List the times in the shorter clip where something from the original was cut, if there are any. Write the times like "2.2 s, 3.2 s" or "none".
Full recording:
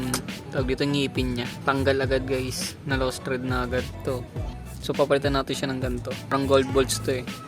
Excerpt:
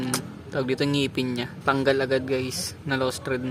none